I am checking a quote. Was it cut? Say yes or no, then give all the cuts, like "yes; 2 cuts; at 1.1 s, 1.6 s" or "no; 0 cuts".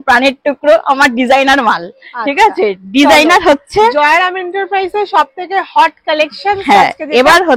no; 0 cuts